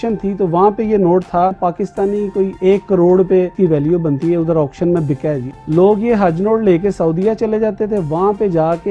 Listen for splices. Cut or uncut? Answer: cut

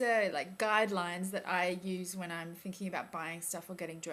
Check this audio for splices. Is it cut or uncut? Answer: cut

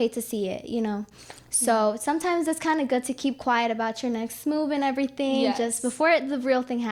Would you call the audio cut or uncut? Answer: uncut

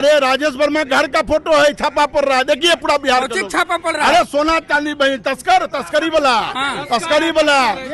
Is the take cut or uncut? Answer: uncut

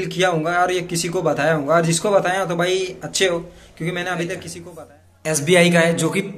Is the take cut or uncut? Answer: cut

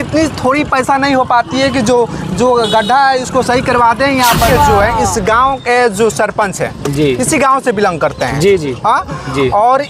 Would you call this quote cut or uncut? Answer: cut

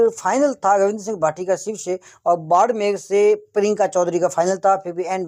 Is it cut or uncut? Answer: uncut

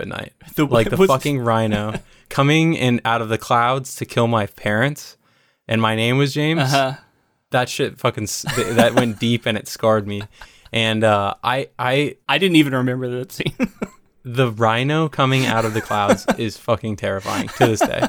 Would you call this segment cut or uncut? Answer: uncut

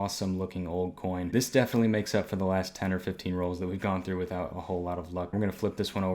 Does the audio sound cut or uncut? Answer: cut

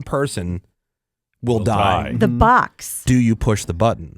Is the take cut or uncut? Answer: cut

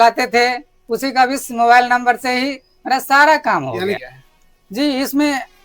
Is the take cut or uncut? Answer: cut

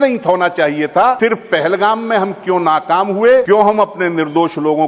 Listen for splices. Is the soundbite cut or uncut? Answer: cut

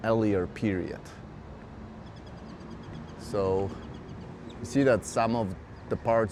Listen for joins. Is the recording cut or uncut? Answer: uncut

